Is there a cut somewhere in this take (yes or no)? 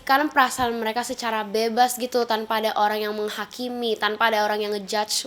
no